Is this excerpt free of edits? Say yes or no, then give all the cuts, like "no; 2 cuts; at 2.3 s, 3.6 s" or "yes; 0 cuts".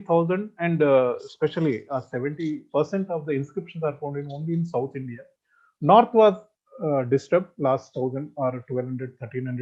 yes; 0 cuts